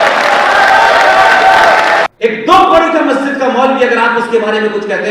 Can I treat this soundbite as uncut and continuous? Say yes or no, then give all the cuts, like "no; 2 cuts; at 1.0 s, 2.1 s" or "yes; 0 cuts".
no; 1 cut; at 2.1 s